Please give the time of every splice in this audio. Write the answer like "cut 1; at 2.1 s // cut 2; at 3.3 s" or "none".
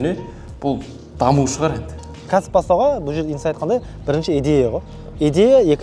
cut 1; at 2.3 s